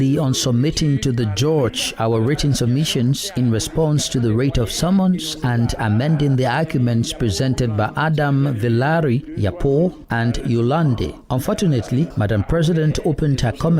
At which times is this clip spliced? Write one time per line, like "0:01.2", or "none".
0:12.1

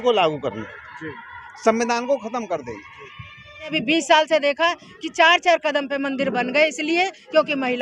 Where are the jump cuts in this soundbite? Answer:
0:03.8

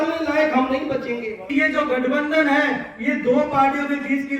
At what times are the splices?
0:01.4

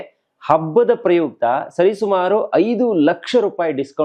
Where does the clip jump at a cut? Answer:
none

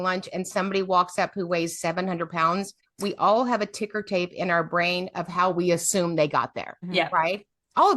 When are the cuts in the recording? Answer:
0:02.8
0:06.8

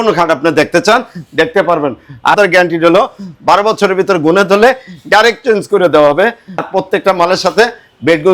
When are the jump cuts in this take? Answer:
0:02.4
0:06.6

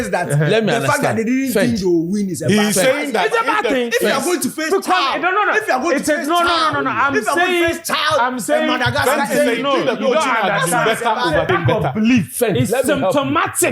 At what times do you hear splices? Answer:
0:11.5

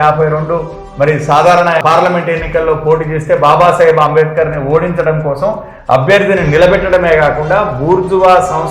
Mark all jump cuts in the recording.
0:01.8

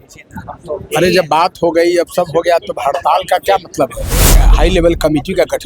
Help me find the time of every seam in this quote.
0:04.4

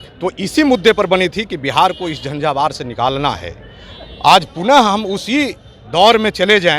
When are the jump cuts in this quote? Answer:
none

